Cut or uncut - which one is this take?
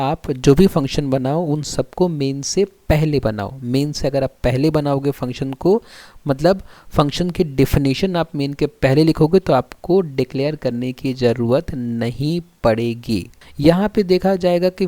cut